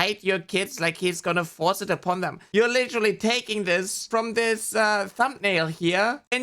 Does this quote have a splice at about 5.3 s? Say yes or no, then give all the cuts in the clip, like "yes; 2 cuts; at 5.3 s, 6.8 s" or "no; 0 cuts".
no; 2 cuts; at 2.4 s, 4.0 s